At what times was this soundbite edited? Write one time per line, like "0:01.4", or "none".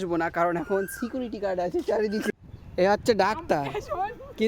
0:02.3